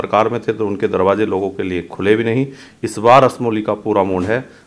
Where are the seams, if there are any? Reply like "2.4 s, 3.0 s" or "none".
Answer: none